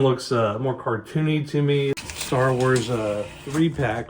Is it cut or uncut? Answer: cut